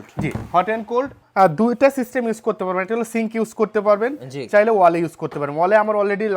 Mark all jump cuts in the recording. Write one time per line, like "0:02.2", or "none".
0:01.2